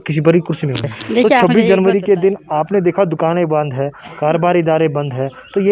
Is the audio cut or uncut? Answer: cut